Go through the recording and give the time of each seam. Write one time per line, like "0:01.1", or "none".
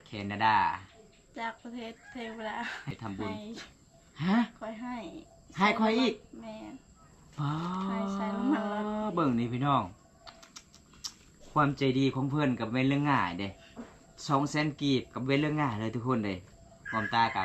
0:02.9